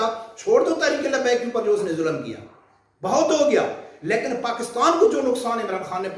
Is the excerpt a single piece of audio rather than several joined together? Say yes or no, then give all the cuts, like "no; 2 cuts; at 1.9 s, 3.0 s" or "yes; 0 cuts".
yes; 0 cuts